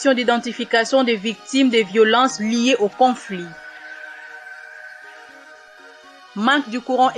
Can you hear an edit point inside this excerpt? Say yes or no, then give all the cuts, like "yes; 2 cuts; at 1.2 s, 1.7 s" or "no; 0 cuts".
yes; 2 cuts; at 3.5 s, 6.3 s